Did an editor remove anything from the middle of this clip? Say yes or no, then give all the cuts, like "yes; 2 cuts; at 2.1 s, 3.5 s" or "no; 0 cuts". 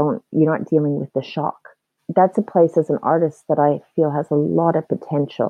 yes; 1 cut; at 2.0 s